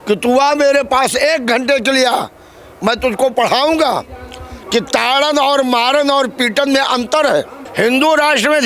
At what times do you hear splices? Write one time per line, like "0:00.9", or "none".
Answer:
0:07.6